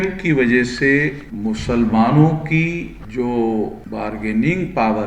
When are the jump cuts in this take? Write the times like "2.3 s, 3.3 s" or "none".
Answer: 1.3 s, 3.0 s, 3.8 s